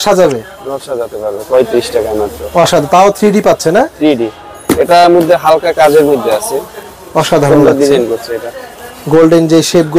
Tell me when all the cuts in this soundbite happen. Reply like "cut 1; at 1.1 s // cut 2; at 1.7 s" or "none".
none